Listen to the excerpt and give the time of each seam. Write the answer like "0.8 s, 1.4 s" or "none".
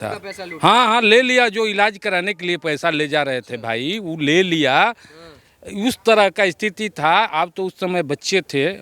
none